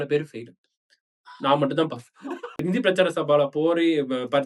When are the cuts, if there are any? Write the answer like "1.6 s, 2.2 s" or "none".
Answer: 2.6 s